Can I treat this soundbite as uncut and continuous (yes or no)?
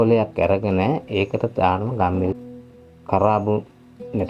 no